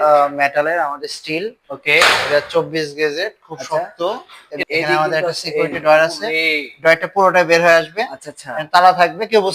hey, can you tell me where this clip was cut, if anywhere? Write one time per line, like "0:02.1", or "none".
0:04.6